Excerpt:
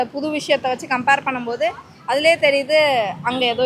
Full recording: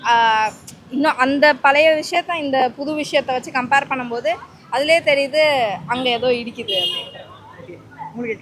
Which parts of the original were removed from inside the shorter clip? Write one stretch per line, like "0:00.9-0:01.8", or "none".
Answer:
none